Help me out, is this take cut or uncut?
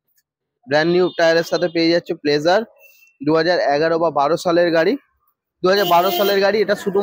uncut